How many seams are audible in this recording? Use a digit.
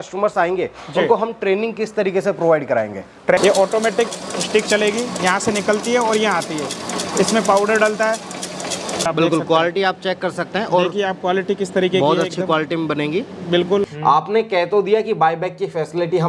3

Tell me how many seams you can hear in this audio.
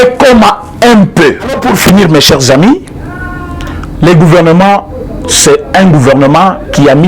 1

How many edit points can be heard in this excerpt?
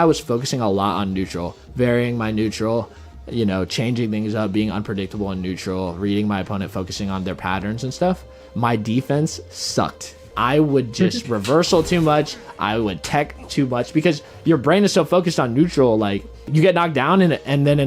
0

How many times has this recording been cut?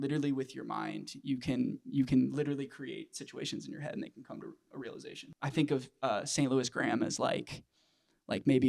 1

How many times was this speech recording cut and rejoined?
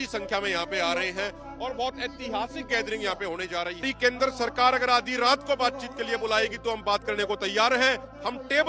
1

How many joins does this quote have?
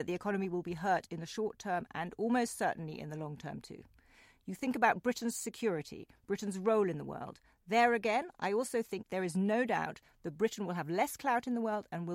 1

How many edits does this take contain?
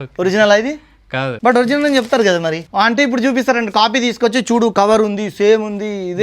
2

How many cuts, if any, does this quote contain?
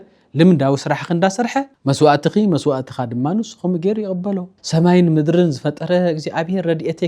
2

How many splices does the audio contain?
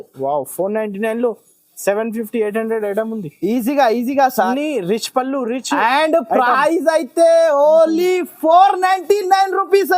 1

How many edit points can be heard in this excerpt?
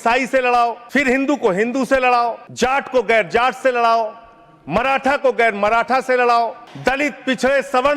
3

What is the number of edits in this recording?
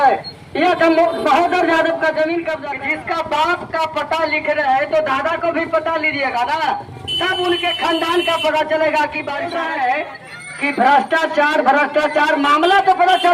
2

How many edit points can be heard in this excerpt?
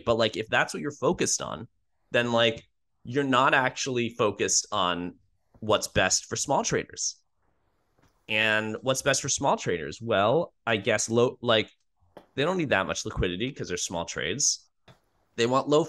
1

